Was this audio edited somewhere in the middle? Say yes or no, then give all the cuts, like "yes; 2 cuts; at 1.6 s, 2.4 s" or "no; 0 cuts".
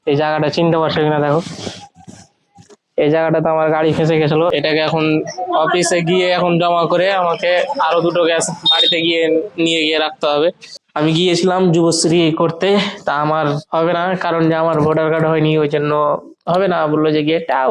yes; 2 cuts; at 4.5 s, 10.8 s